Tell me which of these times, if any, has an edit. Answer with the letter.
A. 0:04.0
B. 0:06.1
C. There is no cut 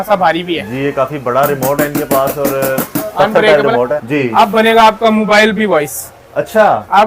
A